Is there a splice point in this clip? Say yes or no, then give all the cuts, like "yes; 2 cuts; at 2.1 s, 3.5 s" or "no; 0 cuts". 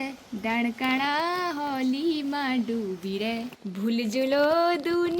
yes; 1 cut; at 3.6 s